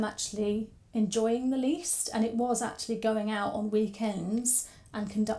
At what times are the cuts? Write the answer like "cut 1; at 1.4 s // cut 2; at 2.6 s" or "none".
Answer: none